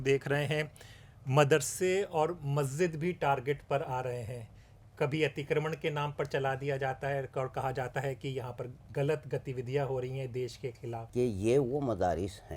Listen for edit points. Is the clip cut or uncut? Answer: cut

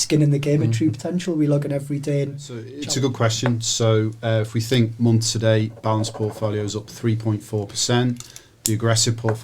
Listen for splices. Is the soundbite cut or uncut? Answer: cut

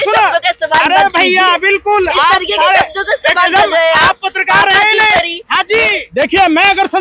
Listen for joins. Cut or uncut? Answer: cut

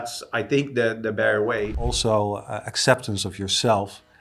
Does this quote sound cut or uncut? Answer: cut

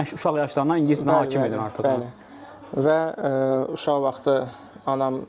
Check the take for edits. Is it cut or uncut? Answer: uncut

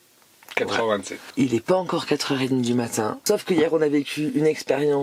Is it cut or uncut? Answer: cut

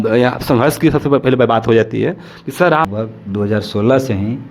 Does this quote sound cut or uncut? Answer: cut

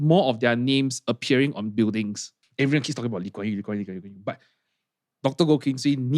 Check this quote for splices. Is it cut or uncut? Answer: cut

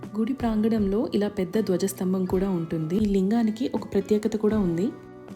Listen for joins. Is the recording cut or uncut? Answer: cut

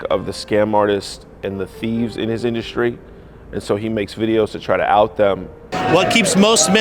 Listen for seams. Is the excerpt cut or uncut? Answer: cut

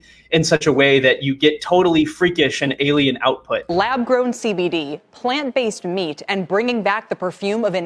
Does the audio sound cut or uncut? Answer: cut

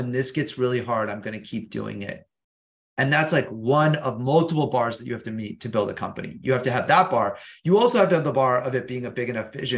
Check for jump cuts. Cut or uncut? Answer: uncut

